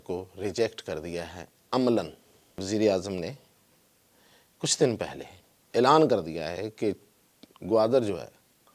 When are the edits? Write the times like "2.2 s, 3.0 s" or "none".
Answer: 2.6 s